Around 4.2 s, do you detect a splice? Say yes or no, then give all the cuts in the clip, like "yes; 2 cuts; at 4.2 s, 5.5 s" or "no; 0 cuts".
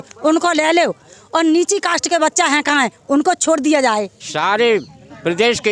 yes; 1 cut; at 4.2 s